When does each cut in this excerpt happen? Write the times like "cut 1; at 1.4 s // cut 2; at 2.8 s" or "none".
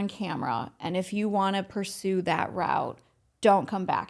none